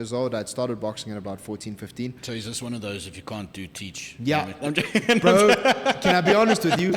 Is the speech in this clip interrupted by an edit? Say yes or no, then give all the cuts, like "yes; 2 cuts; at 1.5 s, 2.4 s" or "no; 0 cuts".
no; 0 cuts